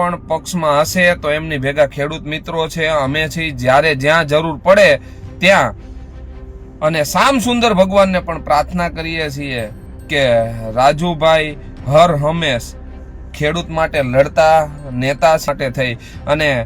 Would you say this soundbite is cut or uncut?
cut